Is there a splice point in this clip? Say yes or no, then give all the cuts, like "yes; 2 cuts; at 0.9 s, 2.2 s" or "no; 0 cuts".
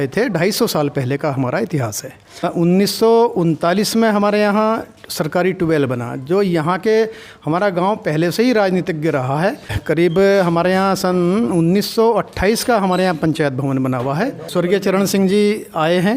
yes; 3 cuts; at 2.5 s, 9.8 s, 14.4 s